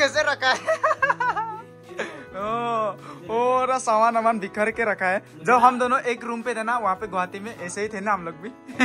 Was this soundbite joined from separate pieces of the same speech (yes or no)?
no